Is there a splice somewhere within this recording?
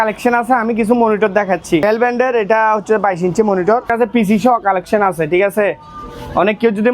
yes; 2 cuts; at 1.8 s, 3.9 s

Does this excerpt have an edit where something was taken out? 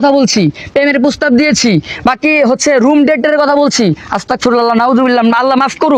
no; 0 cuts

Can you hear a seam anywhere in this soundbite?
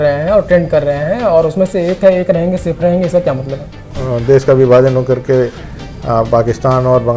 yes; 1 cut; at 3.9 s

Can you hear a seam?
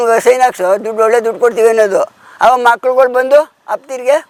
no; 0 cuts

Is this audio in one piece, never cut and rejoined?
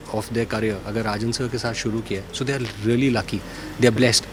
yes; 0 cuts

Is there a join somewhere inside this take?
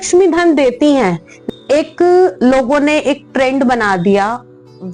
yes; 1 cut; at 1.3 s

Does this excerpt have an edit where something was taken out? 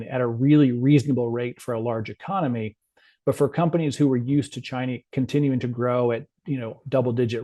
no; 0 cuts

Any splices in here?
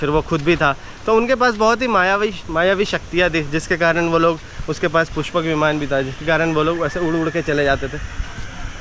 no; 0 cuts

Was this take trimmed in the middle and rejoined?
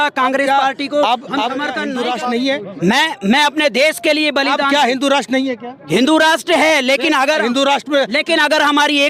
yes; 1 cut; at 1.8 s

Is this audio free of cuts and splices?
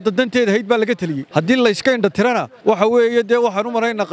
no; 2 cuts; at 1.2 s, 2.5 s

